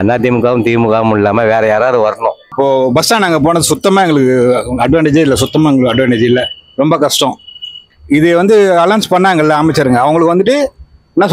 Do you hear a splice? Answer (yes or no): yes